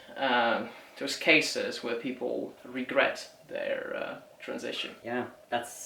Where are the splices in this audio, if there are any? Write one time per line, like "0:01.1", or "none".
0:04.9